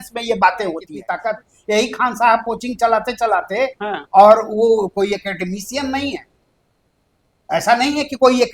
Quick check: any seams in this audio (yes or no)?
yes